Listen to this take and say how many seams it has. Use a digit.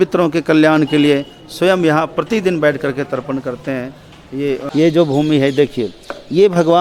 1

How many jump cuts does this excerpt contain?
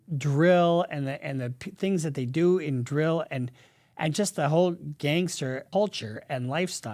1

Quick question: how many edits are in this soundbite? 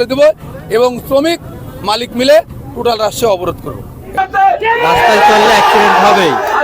1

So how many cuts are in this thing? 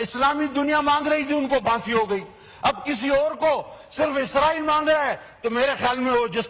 0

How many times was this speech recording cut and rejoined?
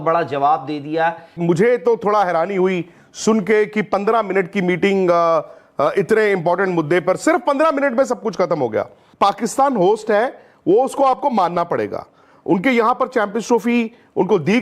2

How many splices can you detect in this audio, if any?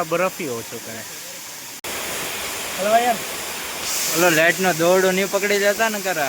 1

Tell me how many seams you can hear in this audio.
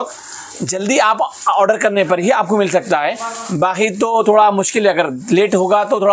0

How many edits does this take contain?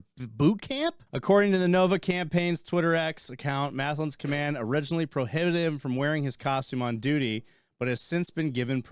1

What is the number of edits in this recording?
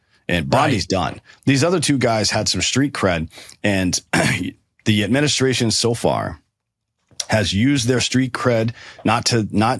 1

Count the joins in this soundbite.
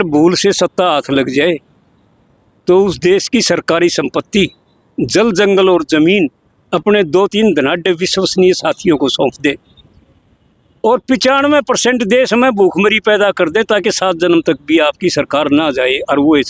0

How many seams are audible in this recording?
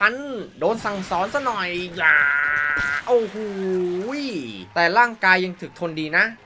0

